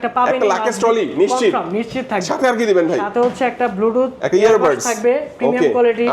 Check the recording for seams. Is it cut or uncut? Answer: uncut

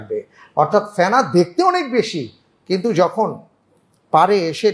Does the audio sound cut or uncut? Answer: uncut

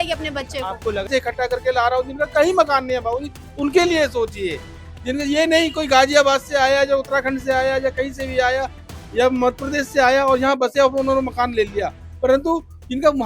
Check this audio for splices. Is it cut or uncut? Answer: cut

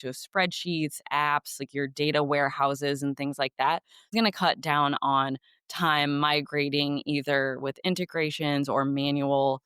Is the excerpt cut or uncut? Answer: cut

